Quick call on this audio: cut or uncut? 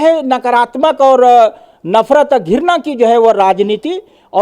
uncut